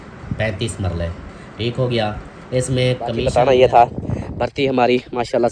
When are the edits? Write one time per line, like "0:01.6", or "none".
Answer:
0:03.3